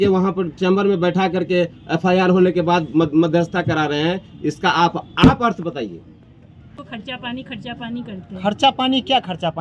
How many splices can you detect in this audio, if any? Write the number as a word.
one